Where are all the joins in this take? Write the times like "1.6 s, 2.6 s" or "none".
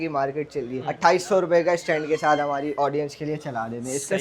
none